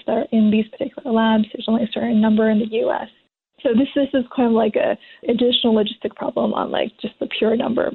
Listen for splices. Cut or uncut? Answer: uncut